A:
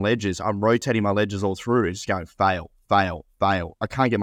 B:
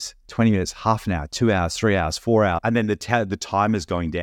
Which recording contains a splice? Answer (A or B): B